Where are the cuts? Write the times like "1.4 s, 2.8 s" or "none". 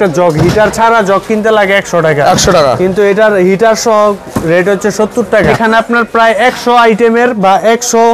5.5 s

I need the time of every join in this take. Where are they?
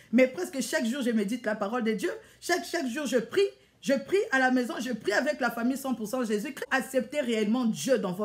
6.6 s

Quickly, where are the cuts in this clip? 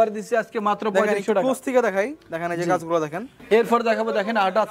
3.4 s

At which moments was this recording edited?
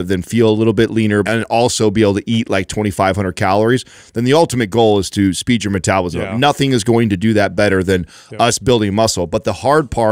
1.2 s

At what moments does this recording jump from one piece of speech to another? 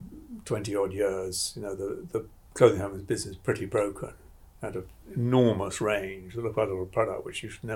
5.0 s

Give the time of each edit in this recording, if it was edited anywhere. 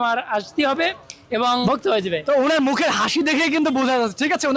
1.6 s

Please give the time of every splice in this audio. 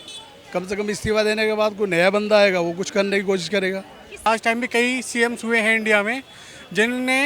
4.2 s

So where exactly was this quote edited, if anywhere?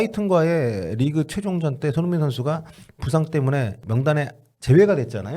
3.8 s

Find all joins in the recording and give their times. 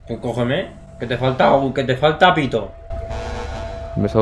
none

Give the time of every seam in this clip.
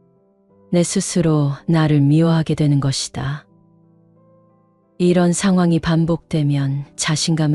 0.7 s, 3.4 s, 5.0 s

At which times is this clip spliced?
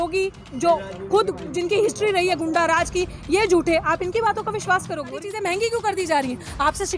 5.2 s

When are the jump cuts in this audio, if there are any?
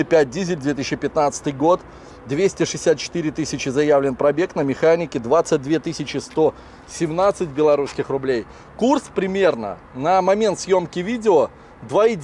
none

